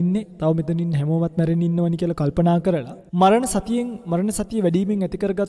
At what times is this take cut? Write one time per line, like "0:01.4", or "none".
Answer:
0:03.0